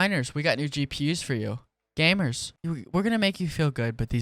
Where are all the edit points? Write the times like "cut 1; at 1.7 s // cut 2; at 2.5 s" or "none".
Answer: cut 1; at 2.5 s